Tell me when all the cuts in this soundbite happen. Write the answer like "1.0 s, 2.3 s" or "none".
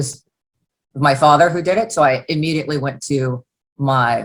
none